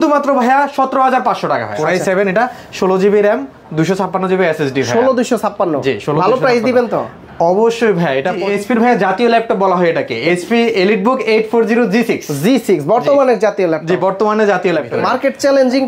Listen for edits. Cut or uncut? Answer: cut